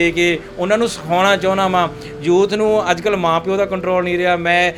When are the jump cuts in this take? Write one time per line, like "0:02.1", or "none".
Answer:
none